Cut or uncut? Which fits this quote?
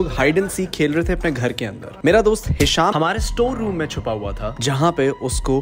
uncut